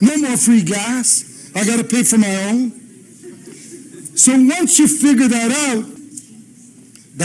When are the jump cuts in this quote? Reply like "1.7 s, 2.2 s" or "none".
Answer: 6.0 s